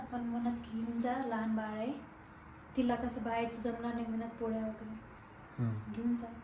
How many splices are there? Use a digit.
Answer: 0